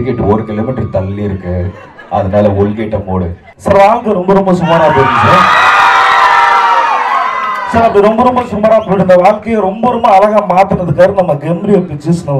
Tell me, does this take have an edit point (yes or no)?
yes